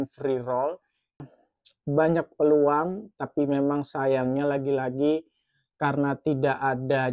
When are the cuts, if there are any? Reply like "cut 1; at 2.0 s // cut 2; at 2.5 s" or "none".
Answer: cut 1; at 1.4 s